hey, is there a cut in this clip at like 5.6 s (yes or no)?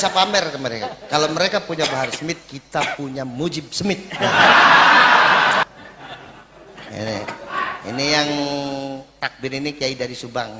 yes